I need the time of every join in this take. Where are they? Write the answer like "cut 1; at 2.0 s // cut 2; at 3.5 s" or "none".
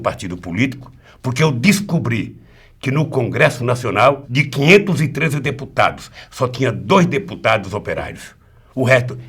none